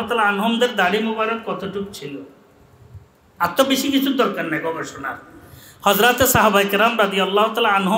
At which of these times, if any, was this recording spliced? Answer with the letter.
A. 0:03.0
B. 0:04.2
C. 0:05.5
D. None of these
D